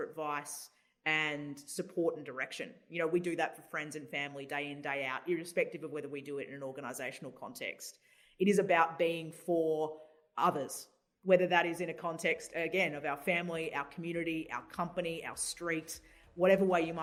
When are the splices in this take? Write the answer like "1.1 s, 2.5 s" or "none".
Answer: none